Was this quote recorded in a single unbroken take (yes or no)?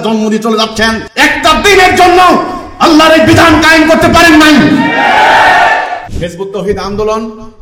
no